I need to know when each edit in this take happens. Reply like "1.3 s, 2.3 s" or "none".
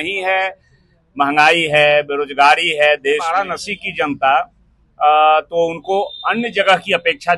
3.3 s